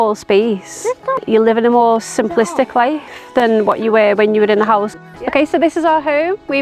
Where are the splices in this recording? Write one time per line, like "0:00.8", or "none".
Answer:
0:01.1
0:05.0